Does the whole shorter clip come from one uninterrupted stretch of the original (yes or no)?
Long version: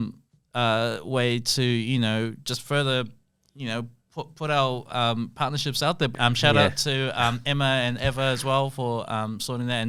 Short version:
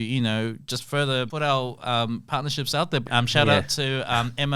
no